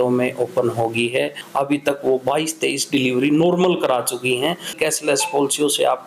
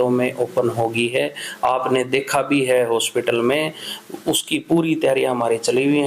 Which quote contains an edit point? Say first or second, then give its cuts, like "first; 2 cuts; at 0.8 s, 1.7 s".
first; 2 cuts; at 1.4 s, 4.7 s